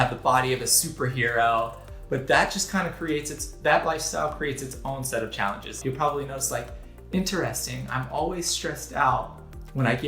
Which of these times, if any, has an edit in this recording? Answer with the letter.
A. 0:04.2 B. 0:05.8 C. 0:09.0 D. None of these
B